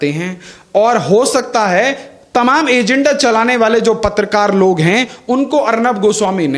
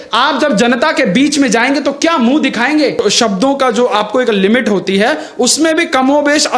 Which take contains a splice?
second; 1 cut; at 2.9 s

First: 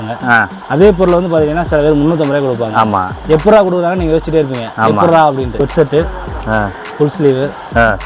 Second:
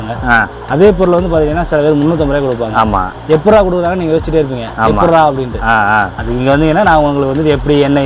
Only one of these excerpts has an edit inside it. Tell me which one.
first; 1 cut; at 5.5 s

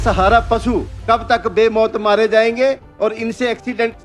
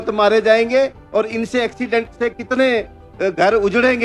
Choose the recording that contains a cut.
first; 1 cut; at 0.9 s

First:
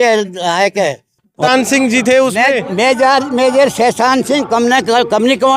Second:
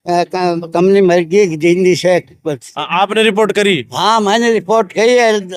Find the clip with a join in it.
first; 1 cut; at 1.4 s

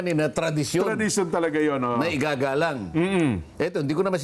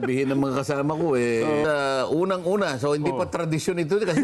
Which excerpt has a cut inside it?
second; 1 cut; at 1.6 s

